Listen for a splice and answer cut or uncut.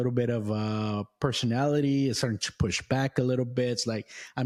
uncut